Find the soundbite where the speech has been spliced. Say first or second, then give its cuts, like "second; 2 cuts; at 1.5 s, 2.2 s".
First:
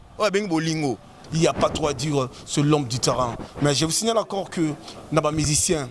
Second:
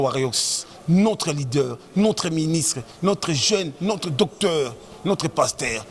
first; 1 cut; at 1.2 s